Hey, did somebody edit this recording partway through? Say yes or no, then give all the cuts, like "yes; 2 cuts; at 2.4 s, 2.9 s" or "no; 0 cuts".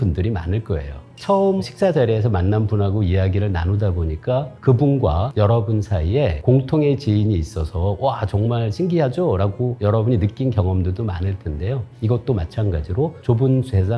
no; 0 cuts